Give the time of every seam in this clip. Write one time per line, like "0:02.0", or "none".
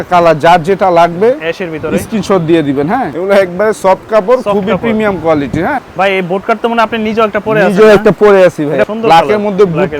0:03.1
0:05.9
0:08.9